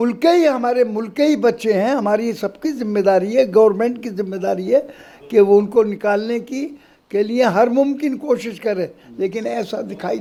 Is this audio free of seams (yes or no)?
yes